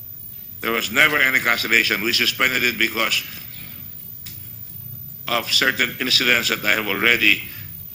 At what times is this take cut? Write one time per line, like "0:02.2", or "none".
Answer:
0:03.6